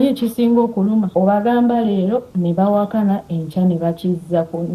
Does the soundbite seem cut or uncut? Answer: cut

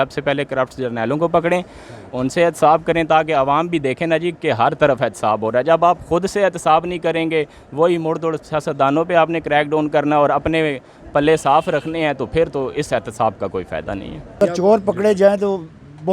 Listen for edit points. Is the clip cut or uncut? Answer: cut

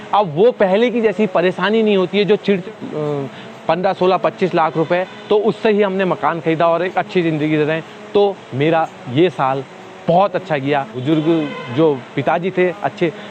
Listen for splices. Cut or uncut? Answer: cut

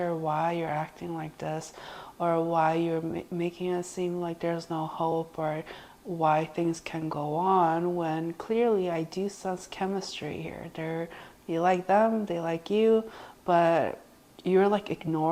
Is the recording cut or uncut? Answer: uncut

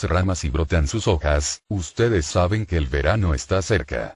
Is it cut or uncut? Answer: uncut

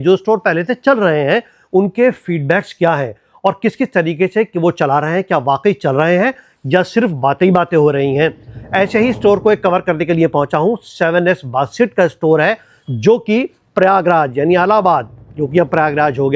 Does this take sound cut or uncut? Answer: uncut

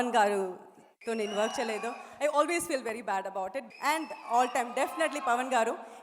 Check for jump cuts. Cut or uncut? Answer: cut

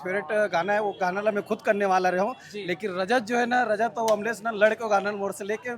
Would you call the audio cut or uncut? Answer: uncut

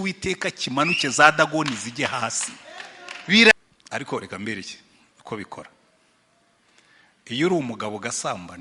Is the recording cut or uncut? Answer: cut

